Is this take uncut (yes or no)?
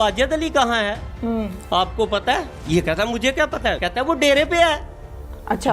no